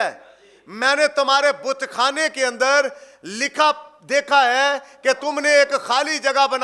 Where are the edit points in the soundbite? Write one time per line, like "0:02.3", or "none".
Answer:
0:05.2